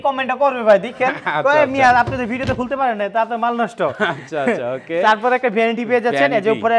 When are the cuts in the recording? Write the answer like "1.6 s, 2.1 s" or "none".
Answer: none